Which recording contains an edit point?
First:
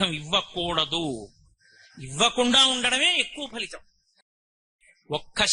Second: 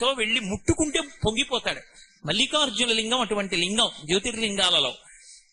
first; 1 cut; at 4.6 s

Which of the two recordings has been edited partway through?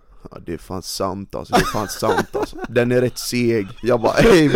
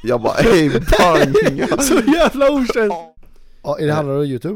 second; 1 cut; at 3.0 s

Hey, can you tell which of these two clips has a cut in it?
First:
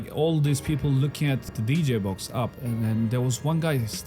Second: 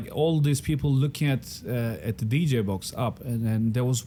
first; 1 cut; at 1.5 s

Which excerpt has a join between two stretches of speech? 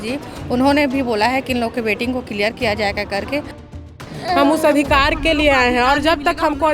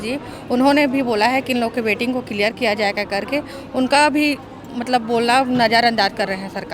first; 1 cut; at 3.7 s

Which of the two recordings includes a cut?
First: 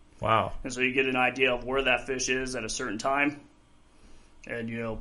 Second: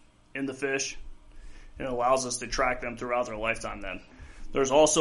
second; 1 cut; at 4.1 s

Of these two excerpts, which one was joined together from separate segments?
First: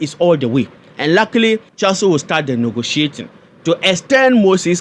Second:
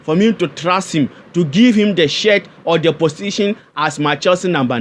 first; 1 cut; at 1.7 s

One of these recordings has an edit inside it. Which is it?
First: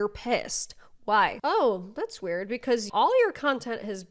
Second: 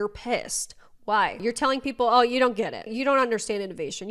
first; 1 cut; at 1.4 s

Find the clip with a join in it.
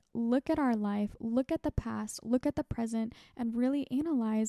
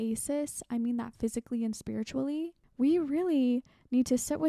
second; 1 cut; at 2.6 s

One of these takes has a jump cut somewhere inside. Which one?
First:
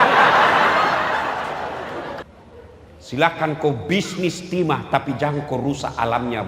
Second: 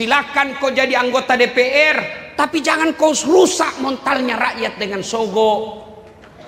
first; 1 cut; at 2.2 s

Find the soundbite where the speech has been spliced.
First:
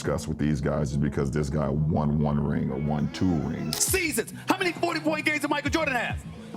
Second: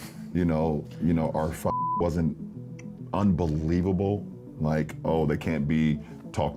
first; 1 cut; at 3.8 s

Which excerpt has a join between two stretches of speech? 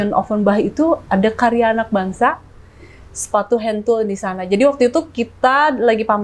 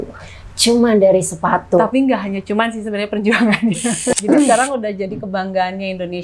second; 1 cut; at 4.1 s

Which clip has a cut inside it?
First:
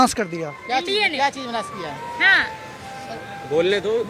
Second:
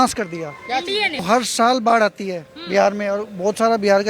second; 1 cut; at 1.2 s

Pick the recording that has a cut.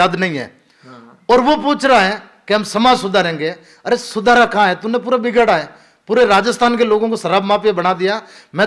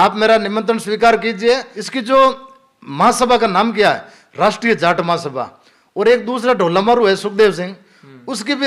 second; 1 cut; at 1.8 s

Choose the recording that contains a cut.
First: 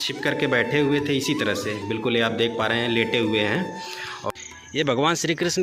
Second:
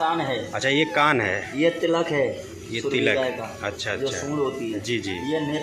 first; 1 cut; at 4.3 s

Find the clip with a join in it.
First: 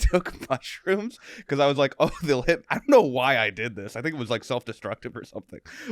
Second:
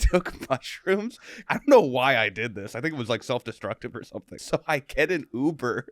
second; 2 cuts; at 1.4 s, 4.3 s

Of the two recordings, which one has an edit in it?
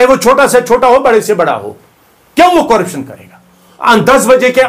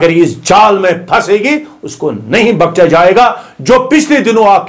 first; 1 cut; at 3.6 s

